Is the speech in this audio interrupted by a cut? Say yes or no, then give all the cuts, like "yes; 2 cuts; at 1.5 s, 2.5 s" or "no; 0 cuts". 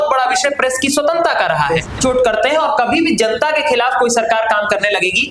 yes; 1 cut; at 1.9 s